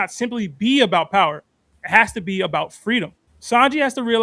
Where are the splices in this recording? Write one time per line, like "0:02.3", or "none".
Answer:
none

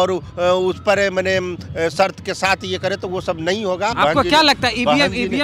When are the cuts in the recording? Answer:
0:04.0

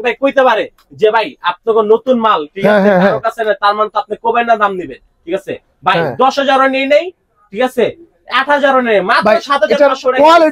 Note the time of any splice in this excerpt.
none

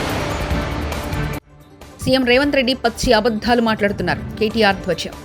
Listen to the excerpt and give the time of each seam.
0:01.2

